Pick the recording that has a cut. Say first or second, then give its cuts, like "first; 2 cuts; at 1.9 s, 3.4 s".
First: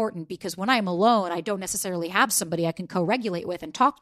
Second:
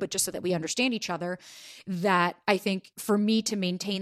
second; 1 cut; at 2.9 s